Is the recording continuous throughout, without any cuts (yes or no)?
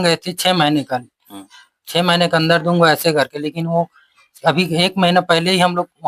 yes